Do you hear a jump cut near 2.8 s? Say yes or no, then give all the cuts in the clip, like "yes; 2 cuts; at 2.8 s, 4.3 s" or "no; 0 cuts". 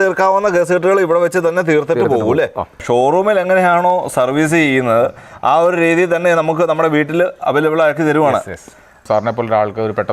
yes; 2 cuts; at 2.8 s, 9.0 s